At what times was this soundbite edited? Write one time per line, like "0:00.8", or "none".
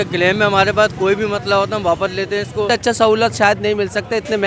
0:02.7